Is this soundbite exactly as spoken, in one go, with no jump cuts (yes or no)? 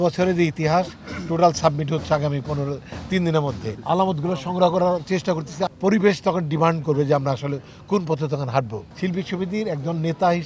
no